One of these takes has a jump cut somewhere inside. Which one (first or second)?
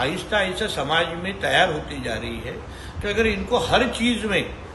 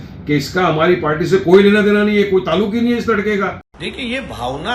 second